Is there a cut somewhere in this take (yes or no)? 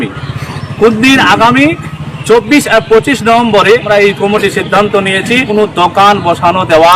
yes